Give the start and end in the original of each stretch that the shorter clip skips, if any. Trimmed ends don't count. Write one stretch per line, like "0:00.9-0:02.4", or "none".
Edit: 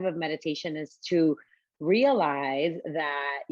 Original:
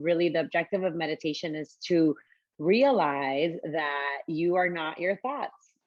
none